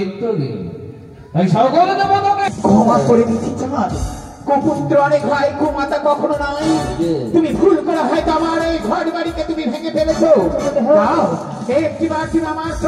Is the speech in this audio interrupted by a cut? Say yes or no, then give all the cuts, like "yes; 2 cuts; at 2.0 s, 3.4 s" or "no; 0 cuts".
yes; 1 cut; at 2.5 s